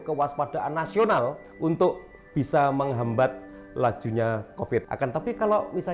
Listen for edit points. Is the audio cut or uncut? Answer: cut